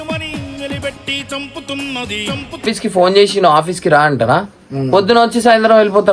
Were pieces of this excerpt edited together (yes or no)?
yes